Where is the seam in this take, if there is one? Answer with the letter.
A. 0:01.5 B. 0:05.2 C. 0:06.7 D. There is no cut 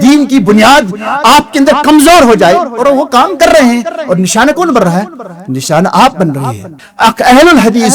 C